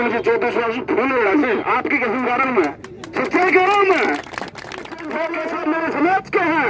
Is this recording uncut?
no; 1 cut; at 5.3 s

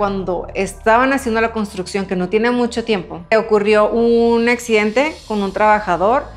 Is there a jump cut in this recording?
no; 0 cuts

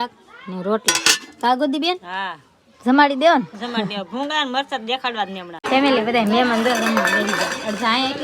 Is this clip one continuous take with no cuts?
no; 1 cut; at 5.6 s

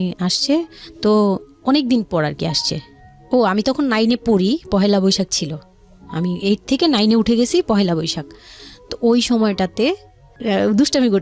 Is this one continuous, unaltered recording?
no; 1 cut; at 10.3 s

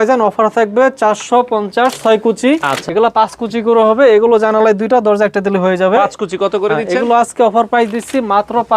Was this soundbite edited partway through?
yes; 1 cut; at 2.8 s

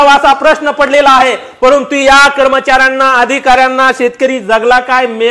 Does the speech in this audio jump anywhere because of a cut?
no; 0 cuts

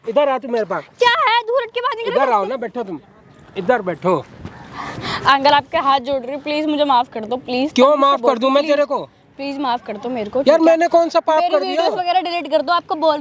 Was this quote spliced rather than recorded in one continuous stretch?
no; 0 cuts

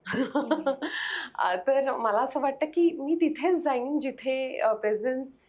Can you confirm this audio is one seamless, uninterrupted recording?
yes; 0 cuts

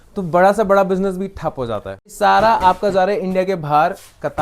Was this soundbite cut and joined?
yes; 1 cut; at 2.1 s

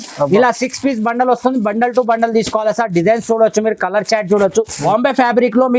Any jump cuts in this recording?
yes; 1 cut; at 4.7 s

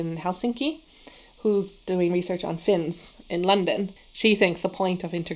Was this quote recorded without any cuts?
no; 1 cut; at 4.0 s

